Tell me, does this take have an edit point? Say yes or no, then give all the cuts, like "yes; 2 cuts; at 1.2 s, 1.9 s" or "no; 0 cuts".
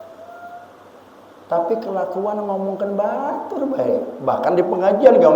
no; 0 cuts